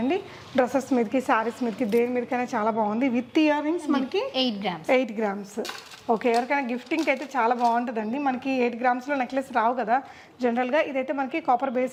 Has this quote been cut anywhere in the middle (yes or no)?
no